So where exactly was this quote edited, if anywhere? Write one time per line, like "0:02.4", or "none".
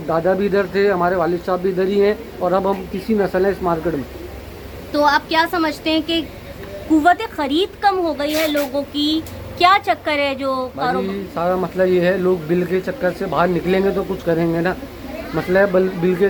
none